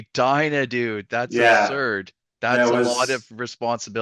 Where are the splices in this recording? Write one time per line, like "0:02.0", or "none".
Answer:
none